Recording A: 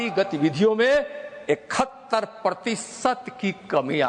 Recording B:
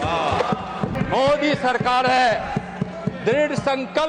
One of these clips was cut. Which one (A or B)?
B